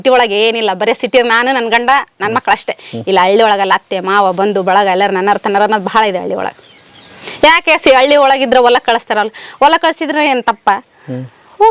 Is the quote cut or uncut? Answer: uncut